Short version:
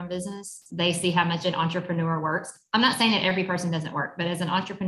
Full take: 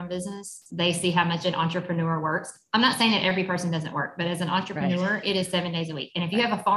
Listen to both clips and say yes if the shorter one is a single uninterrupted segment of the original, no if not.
yes